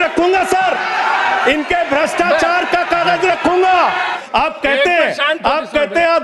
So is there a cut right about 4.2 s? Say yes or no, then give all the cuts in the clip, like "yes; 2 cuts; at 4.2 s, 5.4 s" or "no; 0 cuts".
yes; 1 cut; at 4.2 s